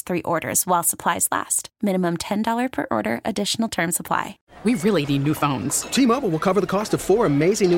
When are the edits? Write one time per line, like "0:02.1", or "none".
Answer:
0:04.3